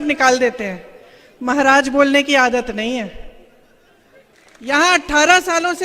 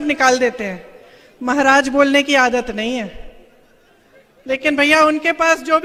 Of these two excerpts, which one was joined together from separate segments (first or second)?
first